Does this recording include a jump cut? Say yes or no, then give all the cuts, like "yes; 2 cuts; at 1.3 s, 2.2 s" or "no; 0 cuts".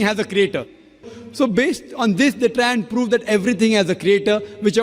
yes; 1 cut; at 1.2 s